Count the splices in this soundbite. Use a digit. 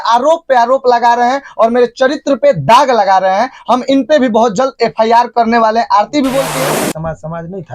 1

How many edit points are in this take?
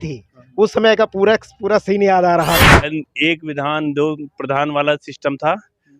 1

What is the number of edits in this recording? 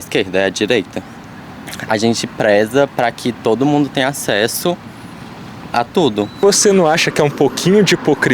1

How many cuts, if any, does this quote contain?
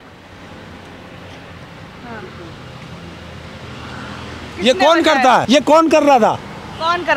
1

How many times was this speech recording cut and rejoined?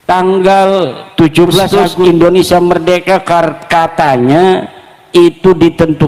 1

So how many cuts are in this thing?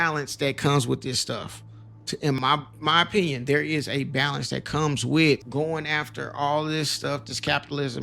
2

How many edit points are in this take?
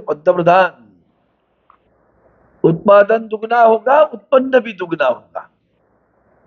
0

